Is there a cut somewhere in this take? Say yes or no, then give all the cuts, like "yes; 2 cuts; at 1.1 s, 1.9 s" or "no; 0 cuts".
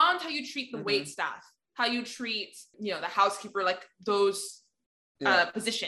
yes; 1 cut; at 2.7 s